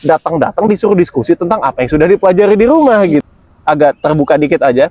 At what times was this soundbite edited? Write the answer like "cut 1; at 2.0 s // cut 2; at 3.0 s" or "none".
cut 1; at 3.2 s